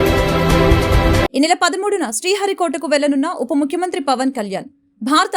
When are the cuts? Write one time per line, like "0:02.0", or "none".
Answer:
0:01.2